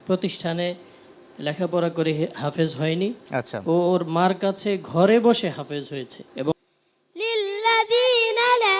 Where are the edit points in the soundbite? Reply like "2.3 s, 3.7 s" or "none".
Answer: 6.5 s